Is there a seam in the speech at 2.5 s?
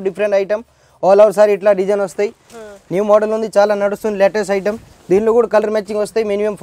yes; 1 cut; at 2.5 s

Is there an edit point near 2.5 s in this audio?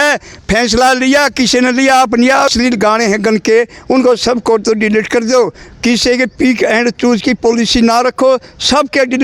yes; 1 cut; at 2.5 s

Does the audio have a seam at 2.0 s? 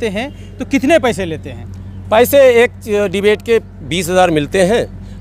no; 0 cuts

